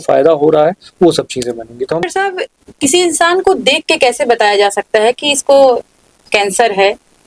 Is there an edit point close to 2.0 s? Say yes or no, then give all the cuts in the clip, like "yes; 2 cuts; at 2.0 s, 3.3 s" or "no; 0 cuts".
yes; 1 cut; at 2.0 s